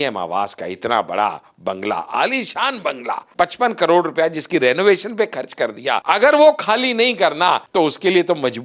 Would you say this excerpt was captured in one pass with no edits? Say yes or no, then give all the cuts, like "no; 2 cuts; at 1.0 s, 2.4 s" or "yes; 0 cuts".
no; 3 cuts; at 3.3 s, 6.0 s, 7.6 s